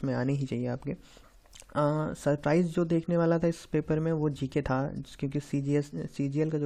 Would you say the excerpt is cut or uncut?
uncut